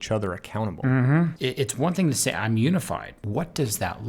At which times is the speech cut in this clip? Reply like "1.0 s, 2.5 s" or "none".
1.4 s, 3.2 s